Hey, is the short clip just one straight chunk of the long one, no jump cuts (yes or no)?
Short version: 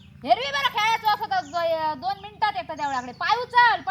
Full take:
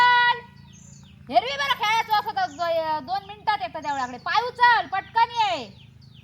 yes